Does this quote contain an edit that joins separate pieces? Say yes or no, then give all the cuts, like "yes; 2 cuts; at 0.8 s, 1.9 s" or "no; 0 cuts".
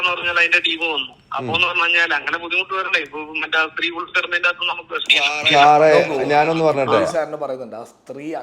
yes; 1 cut; at 7.1 s